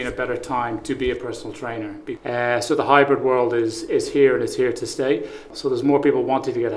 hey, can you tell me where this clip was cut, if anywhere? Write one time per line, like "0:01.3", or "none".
0:02.0
0:05.5

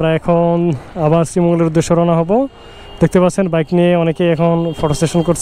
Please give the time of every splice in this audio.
none

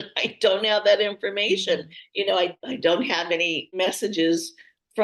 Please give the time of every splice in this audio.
0:02.5
0:03.8

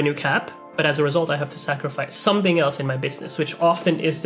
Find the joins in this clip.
none

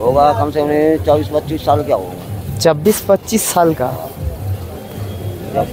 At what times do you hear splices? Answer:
none

